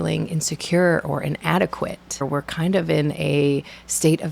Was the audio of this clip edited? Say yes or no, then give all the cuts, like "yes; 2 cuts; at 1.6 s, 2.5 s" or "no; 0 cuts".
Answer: yes; 1 cut; at 2.2 s